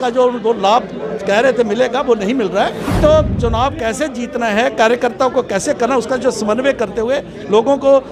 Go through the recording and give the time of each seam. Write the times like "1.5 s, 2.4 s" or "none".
2.9 s